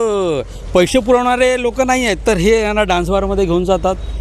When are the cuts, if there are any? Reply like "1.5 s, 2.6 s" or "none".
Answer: none